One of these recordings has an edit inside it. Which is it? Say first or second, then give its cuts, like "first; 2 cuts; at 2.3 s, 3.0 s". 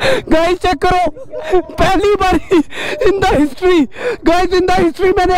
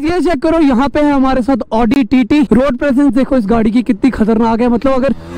second; 1 cut; at 2.5 s